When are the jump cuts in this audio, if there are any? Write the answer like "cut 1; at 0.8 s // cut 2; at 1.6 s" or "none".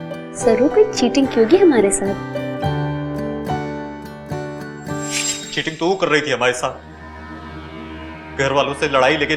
none